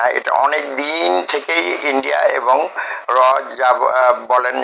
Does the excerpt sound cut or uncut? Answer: uncut